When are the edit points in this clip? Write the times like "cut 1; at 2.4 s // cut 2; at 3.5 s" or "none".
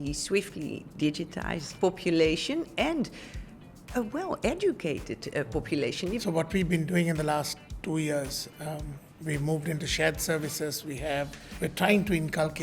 cut 1; at 1.7 s // cut 2; at 6.2 s // cut 3; at 11.4 s